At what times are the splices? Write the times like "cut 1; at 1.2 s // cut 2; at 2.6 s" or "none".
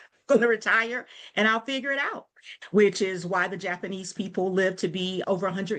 cut 1; at 2.4 s